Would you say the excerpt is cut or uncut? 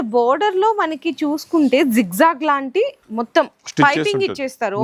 uncut